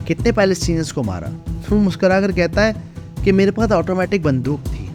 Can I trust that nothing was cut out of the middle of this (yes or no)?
yes